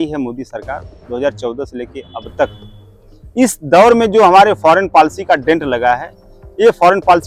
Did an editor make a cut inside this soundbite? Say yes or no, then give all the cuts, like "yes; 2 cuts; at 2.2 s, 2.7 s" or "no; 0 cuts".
no; 0 cuts